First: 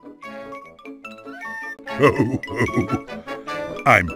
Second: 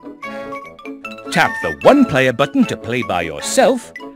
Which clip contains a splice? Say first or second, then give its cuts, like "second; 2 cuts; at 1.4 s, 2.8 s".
second; 1 cut; at 1.3 s